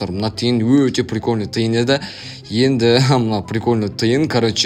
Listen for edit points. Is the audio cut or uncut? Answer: uncut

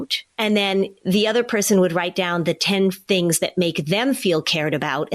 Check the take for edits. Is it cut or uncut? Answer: cut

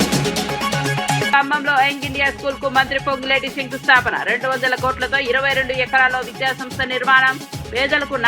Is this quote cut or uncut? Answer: cut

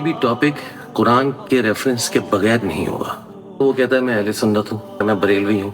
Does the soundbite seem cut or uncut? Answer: cut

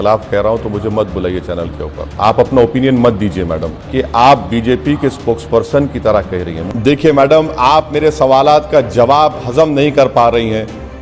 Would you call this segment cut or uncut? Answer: cut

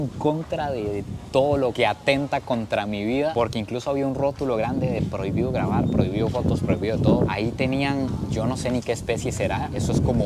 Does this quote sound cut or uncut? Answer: uncut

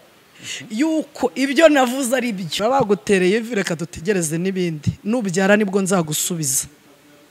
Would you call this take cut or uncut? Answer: cut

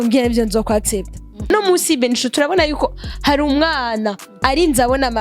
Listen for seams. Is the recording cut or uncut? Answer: cut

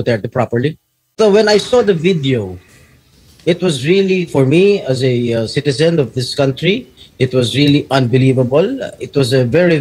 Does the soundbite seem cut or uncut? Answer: cut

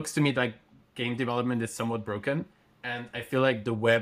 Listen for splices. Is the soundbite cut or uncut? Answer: uncut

